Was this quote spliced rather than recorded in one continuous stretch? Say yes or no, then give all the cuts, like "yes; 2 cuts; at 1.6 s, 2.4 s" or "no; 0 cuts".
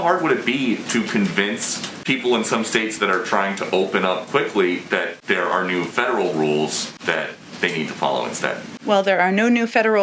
no; 0 cuts